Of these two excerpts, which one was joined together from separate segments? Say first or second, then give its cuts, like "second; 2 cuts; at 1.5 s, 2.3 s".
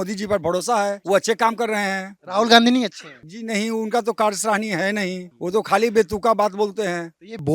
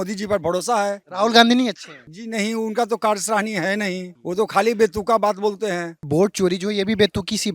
second; 2 cuts; at 1.0 s, 5.9 s